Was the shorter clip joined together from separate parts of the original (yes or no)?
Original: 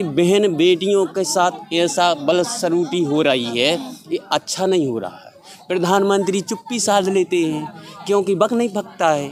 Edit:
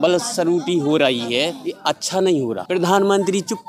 yes